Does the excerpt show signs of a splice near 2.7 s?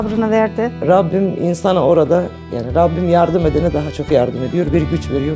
no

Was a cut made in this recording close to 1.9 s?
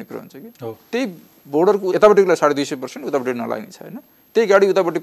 yes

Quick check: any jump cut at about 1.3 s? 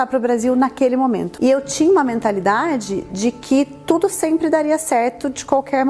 yes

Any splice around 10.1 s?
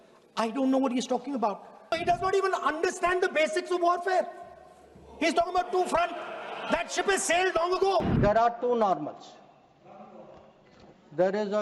no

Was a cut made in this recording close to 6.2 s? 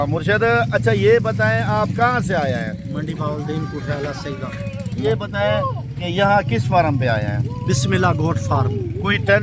no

